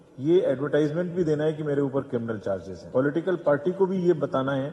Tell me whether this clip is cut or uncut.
cut